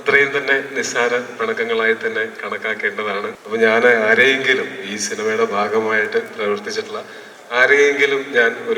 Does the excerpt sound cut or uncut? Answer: cut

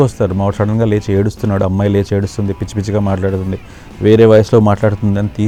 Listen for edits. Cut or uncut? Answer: uncut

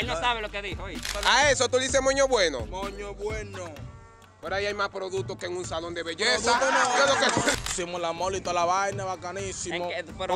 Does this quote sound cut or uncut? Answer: cut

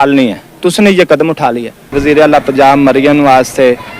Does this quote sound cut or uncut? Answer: cut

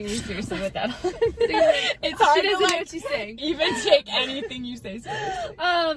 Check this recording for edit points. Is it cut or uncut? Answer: uncut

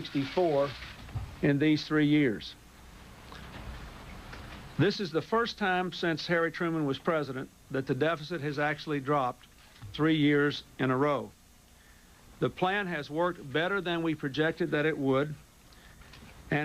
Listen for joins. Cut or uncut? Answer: uncut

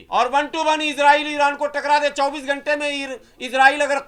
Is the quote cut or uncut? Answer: uncut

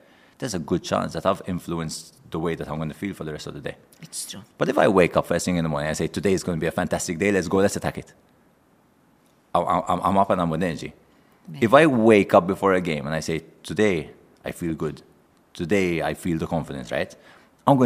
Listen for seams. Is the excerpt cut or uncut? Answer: uncut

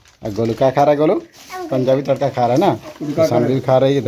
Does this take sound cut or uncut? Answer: uncut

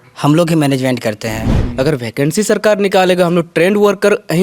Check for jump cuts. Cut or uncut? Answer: cut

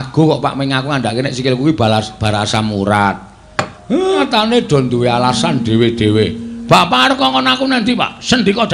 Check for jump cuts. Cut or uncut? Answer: cut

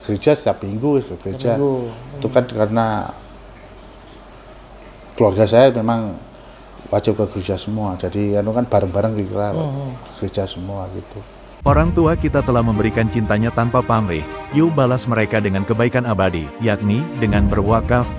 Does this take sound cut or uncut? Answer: cut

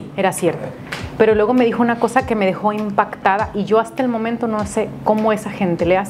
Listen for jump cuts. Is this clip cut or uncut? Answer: uncut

